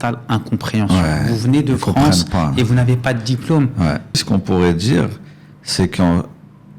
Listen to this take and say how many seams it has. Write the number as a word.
one